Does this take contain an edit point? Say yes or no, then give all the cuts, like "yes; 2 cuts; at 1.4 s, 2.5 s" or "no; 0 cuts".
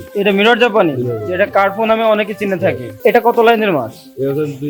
yes; 1 cut; at 3.0 s